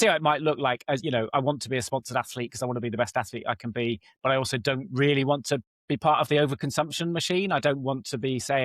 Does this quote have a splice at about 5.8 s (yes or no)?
no